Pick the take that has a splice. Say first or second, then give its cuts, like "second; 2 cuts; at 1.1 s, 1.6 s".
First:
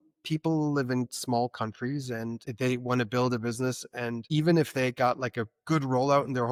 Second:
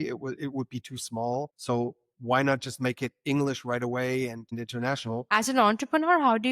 second; 2 cuts; at 1.5 s, 5.2 s